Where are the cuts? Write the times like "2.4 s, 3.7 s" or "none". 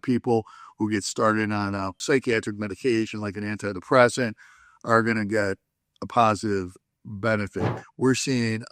1.9 s, 7.8 s